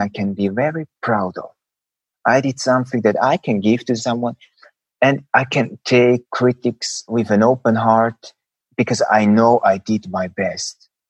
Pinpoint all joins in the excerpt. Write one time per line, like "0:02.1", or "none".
0:06.3